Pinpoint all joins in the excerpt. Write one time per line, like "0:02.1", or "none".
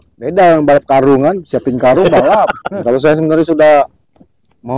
0:02.7